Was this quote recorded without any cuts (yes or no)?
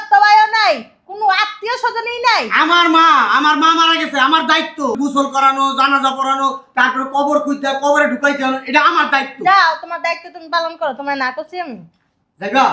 no